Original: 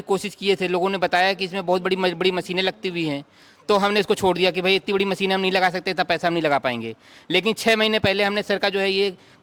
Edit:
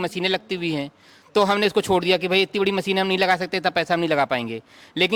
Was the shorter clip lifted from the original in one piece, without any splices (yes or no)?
yes